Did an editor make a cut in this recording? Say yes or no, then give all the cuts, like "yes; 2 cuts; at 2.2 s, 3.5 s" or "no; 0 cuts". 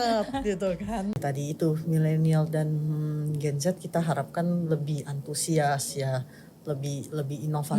yes; 1 cut; at 1.2 s